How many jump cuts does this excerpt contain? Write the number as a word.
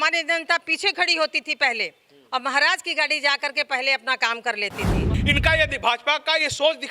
one